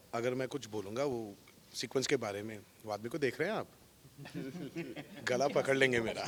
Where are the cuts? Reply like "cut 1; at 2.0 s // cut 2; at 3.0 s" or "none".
none